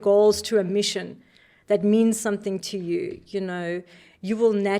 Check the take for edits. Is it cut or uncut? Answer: uncut